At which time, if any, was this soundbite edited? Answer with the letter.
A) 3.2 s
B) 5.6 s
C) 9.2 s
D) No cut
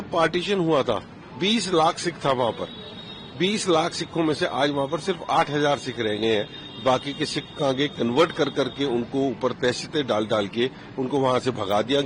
D